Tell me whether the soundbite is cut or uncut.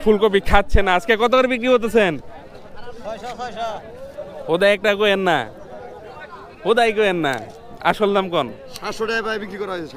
uncut